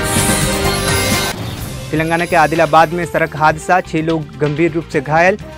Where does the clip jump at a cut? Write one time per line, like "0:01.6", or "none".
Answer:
0:01.4